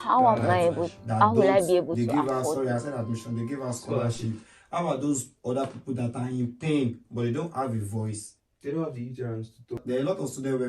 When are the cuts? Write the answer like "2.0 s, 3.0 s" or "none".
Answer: 9.8 s